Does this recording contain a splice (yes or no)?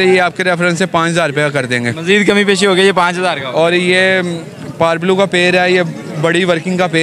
no